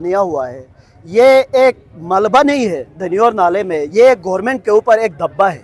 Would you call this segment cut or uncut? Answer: uncut